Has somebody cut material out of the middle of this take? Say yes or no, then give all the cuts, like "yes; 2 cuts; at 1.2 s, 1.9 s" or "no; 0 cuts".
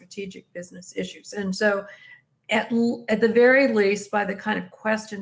no; 0 cuts